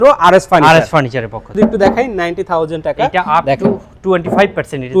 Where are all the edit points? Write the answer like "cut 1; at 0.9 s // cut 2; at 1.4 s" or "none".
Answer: none